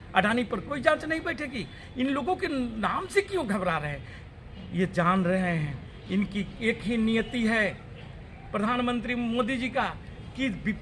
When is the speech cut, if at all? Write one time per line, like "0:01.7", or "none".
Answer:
none